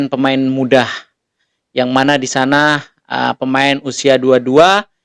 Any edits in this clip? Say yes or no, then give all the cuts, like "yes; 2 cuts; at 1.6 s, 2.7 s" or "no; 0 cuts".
no; 0 cuts